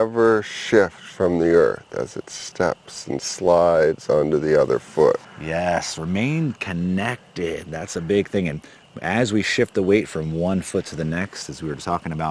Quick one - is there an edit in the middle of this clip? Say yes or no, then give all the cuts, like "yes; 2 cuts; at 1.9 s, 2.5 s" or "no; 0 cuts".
yes; 1 cut; at 5.3 s